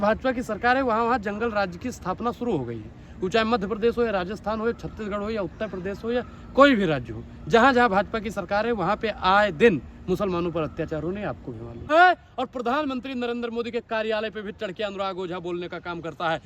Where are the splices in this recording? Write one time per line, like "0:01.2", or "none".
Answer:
0:11.9